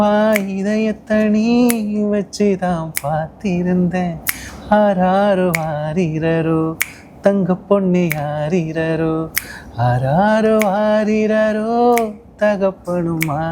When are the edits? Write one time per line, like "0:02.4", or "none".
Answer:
none